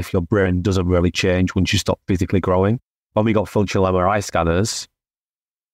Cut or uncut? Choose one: cut